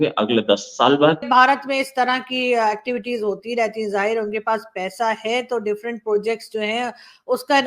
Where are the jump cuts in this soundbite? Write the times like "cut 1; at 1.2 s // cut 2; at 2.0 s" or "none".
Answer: cut 1; at 1.2 s

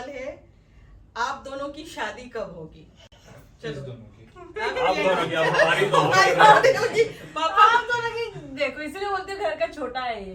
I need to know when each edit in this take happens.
none

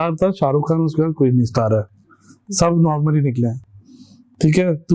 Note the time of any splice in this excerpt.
none

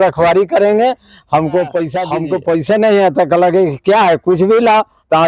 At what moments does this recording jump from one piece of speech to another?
cut 1; at 2.1 s

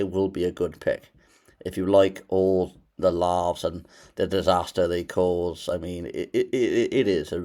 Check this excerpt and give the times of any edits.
none

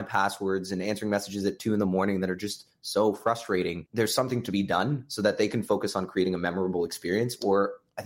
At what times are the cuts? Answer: cut 1; at 3.8 s

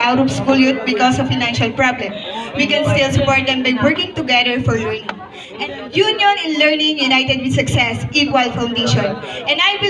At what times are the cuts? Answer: cut 1; at 5.6 s

